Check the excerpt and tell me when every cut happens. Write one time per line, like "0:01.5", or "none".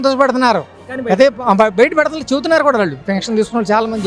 0:03.1